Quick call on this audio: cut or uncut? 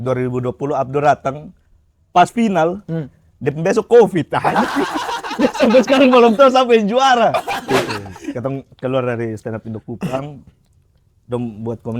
cut